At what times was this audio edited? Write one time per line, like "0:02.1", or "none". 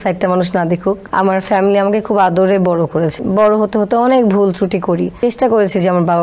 0:01.0
0:03.2
0:05.2

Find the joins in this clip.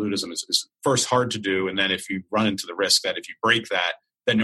none

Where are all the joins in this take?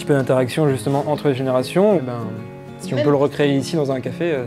none

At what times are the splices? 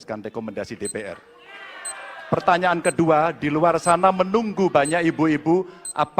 none

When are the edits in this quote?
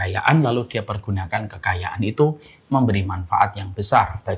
none

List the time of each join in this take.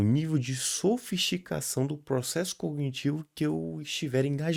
none

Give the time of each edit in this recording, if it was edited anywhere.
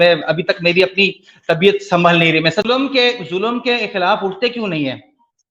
0:02.8

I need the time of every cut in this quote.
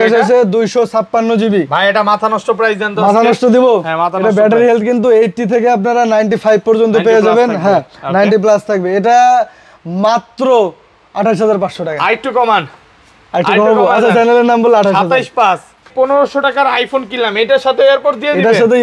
0:15.9

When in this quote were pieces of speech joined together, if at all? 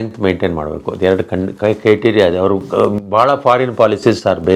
none

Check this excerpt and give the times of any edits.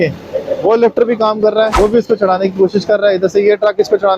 0:01.7

